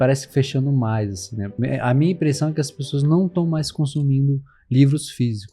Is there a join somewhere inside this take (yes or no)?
yes